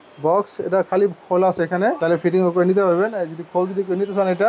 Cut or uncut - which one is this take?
cut